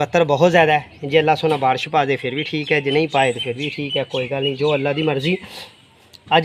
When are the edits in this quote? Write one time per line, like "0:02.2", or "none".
none